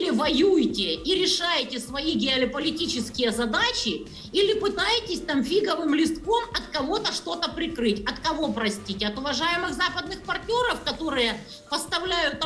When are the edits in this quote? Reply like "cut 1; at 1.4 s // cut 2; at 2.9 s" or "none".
none